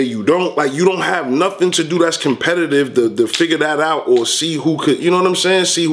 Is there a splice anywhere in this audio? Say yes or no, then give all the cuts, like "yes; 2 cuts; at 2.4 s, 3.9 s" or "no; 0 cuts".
no; 0 cuts